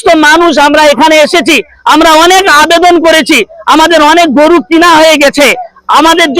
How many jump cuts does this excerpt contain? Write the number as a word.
zero